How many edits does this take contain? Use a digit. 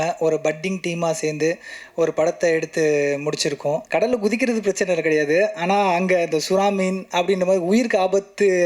1